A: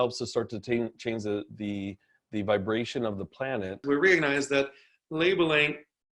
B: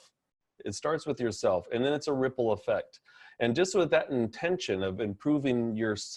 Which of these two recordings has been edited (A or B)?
A